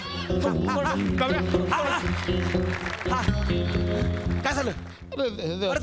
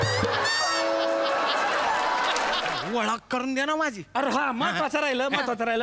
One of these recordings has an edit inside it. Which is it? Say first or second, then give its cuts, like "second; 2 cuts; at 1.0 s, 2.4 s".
second; 1 cut; at 2.8 s